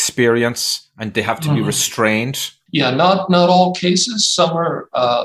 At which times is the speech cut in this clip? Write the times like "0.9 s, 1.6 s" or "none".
none

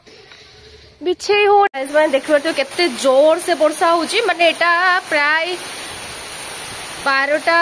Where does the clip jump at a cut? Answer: 1.7 s

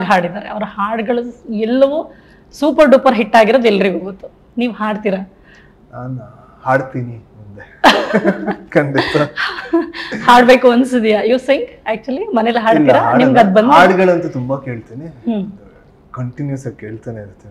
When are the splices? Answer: none

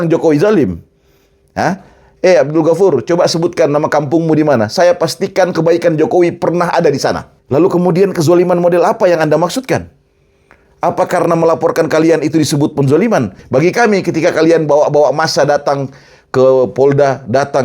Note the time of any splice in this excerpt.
7.3 s, 13.4 s

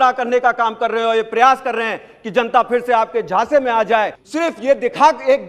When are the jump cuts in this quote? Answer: 4.2 s

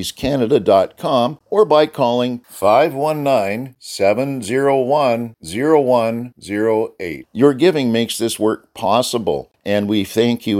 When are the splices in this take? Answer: 1.4 s, 9.5 s

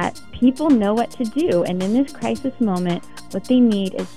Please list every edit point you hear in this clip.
none

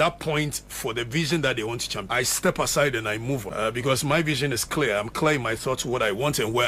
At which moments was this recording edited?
2.0 s, 3.5 s

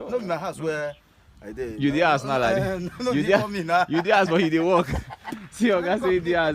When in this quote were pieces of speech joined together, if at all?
none

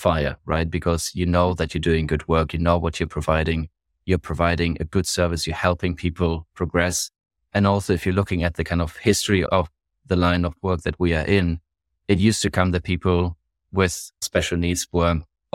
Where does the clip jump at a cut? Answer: 9.4 s, 14.2 s

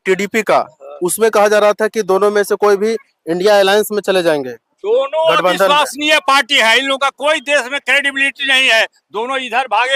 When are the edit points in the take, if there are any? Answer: none

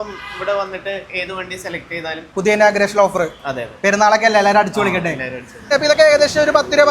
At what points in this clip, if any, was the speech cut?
2.3 s, 5.7 s

